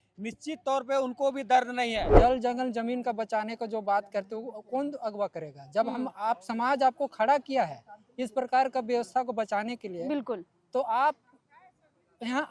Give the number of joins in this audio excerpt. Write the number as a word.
one